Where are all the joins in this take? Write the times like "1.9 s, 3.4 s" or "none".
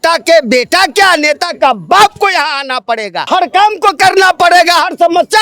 3.2 s